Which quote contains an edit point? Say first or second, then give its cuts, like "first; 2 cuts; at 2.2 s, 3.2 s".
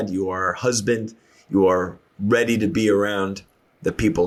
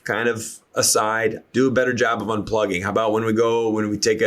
second; 1 cut; at 1.4 s